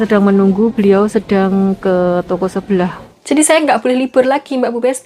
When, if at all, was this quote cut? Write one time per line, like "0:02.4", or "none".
0:03.0